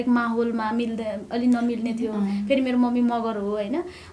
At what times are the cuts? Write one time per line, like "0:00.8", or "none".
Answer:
none